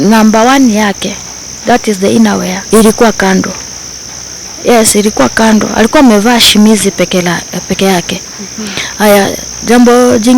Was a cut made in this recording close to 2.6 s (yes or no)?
yes